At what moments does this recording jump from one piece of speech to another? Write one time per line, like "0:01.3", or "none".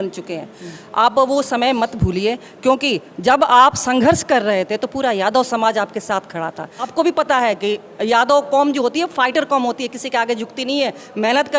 0:06.8